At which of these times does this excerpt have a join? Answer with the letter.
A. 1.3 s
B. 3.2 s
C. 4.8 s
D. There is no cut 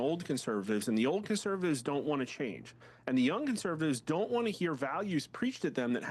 D